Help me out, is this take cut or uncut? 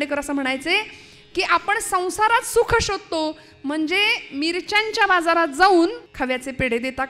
cut